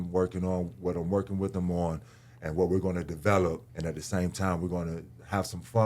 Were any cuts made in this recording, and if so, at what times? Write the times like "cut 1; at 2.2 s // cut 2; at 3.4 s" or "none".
cut 1; at 3.7 s